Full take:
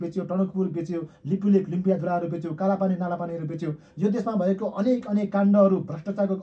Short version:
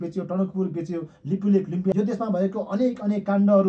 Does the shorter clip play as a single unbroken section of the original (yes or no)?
no